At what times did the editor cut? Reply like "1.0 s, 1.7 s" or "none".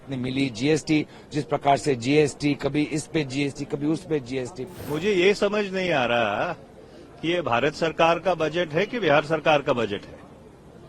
4.7 s